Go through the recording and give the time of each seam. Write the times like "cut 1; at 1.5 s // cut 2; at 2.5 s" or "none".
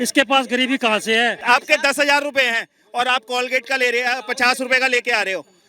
cut 1; at 1.4 s